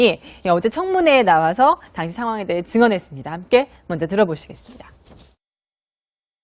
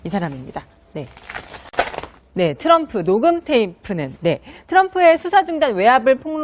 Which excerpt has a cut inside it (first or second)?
second